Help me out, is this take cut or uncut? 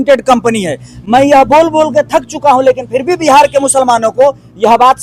uncut